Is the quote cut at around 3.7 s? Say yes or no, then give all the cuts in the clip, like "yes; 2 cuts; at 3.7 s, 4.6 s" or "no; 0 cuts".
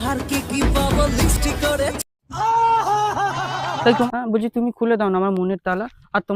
yes; 1 cut; at 3.7 s